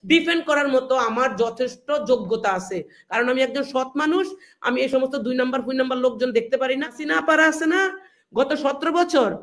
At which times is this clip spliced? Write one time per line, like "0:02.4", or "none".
0:07.0